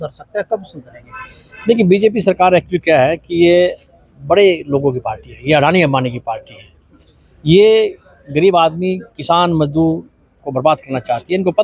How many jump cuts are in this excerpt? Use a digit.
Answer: 0